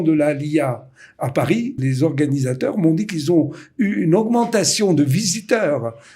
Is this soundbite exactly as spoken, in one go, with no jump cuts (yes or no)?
no